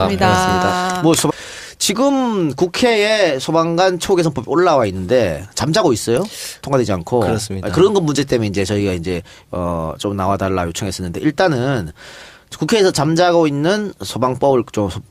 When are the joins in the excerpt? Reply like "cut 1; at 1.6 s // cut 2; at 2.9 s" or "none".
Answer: none